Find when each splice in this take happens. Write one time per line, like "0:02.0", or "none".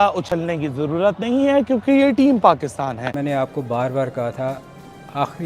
0:03.1